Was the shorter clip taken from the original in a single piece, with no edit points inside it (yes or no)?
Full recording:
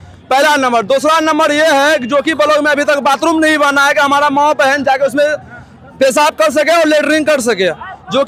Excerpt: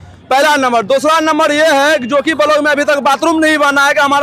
yes